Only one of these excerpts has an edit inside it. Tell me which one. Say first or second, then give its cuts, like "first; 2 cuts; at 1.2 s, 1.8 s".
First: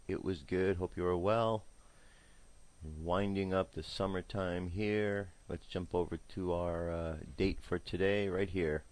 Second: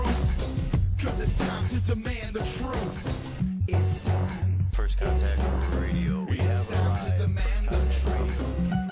first; 1 cut; at 7.5 s